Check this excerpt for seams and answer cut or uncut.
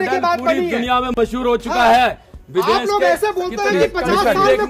uncut